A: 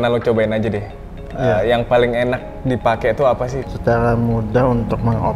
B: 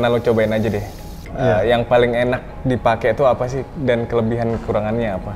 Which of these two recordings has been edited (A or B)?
A